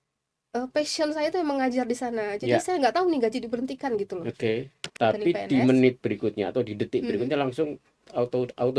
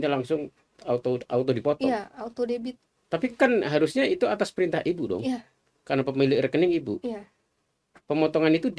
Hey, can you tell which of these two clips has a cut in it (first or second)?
first